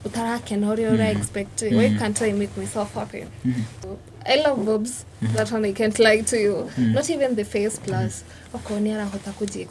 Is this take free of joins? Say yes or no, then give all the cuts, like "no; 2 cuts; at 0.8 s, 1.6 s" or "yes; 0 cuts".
no; 1 cut; at 3.8 s